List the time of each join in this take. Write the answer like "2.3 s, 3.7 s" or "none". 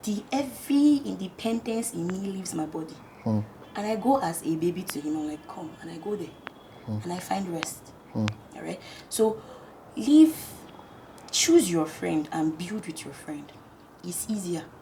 none